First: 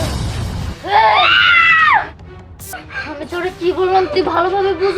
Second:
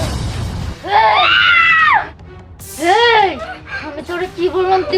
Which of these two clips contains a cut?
first; 1 cut; at 2.7 s

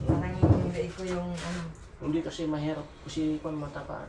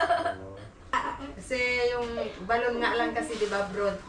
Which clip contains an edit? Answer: second; 1 cut; at 0.9 s

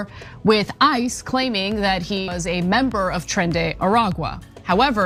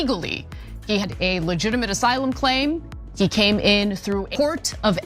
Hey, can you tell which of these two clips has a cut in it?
second; 2 cuts; at 1.0 s, 4.3 s

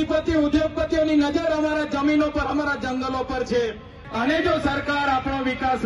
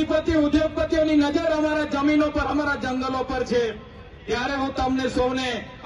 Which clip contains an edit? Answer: first; 1 cut; at 4.0 s

